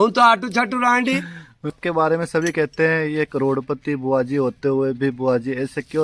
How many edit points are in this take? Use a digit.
1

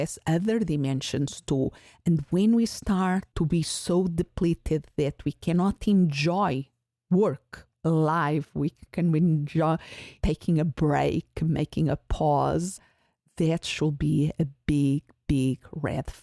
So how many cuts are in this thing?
2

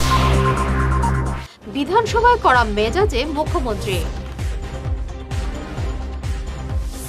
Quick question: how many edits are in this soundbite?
1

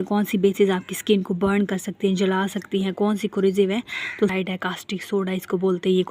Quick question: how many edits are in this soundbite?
1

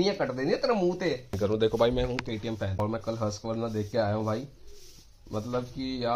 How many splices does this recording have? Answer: 1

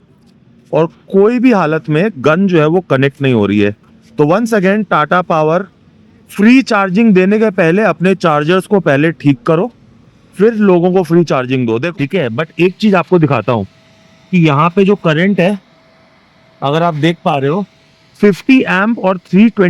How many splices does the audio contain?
1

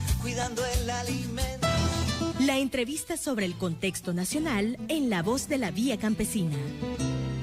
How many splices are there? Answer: 1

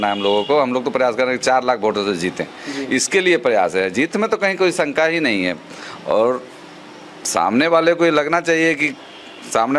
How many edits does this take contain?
0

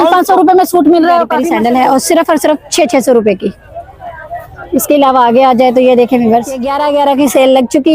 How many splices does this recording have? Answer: 2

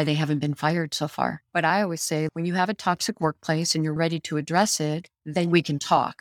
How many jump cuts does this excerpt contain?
2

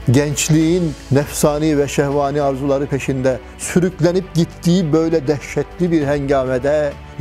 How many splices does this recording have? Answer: 1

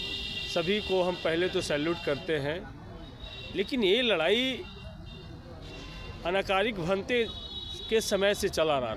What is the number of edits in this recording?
0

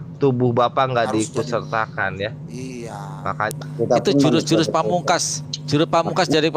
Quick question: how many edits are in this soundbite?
1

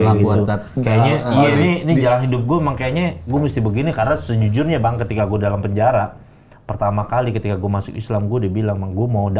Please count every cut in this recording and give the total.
0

